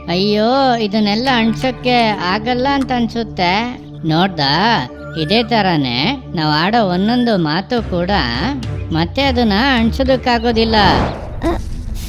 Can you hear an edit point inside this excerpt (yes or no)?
yes